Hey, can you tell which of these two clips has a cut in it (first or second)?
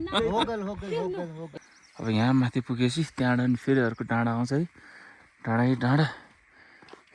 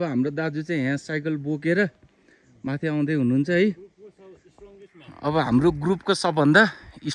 first